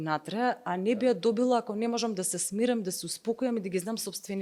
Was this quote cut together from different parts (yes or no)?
no